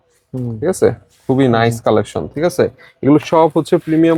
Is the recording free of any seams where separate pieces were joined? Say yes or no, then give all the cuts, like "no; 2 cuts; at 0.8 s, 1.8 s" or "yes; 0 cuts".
yes; 0 cuts